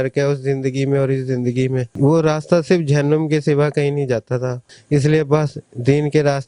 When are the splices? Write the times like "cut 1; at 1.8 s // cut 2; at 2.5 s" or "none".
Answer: cut 1; at 4.6 s